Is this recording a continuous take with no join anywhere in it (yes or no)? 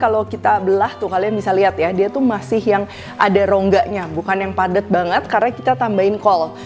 yes